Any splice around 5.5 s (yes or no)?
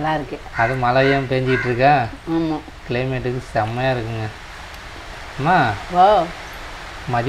no